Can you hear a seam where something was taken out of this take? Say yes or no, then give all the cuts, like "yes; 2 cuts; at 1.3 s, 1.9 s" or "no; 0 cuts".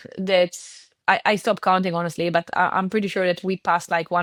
no; 0 cuts